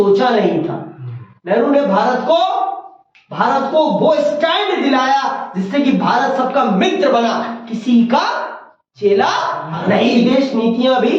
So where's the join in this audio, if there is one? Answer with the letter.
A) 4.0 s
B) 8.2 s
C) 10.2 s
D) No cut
C